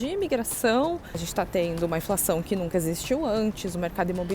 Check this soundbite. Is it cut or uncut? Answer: cut